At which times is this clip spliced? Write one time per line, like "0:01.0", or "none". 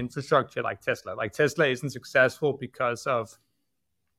none